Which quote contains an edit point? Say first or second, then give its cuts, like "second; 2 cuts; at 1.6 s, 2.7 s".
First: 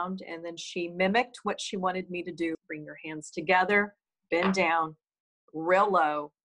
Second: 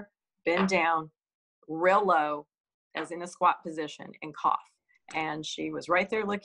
first; 1 cut; at 2.6 s